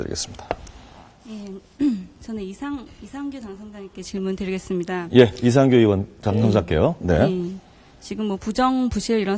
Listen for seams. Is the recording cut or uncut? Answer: uncut